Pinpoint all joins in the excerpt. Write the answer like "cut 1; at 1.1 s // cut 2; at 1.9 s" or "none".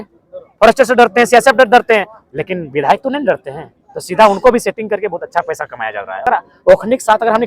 cut 1; at 6.2 s